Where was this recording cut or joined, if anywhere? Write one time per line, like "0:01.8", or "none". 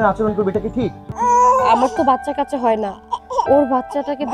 0:01.1